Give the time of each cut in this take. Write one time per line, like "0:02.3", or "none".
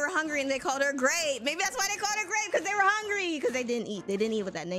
none